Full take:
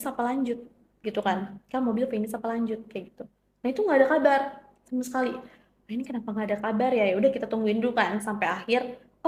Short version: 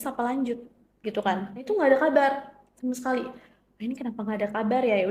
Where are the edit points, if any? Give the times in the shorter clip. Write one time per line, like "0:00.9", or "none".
0:01.6